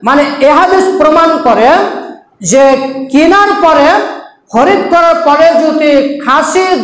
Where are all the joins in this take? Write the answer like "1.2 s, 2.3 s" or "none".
none